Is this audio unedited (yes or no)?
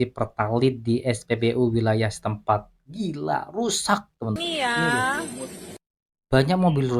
no